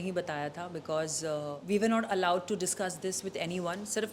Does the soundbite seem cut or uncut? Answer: cut